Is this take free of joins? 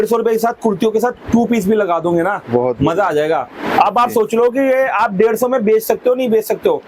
yes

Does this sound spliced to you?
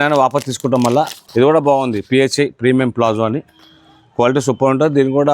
yes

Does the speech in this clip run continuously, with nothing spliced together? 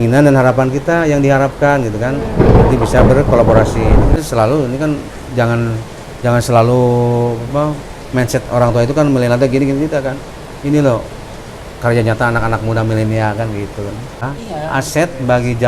no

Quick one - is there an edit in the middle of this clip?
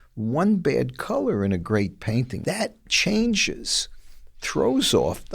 yes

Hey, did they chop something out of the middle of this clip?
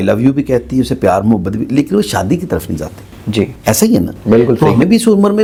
no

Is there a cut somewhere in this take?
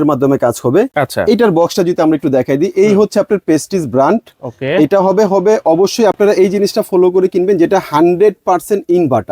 no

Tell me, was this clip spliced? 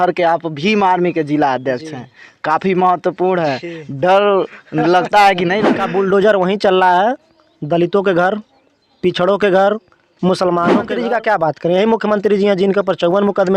yes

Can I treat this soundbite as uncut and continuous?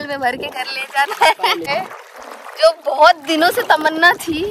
no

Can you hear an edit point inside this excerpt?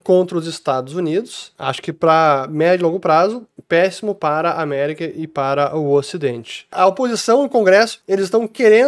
yes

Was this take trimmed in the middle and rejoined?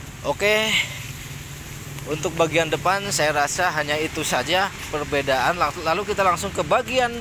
no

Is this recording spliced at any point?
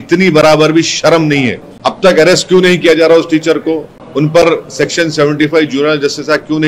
yes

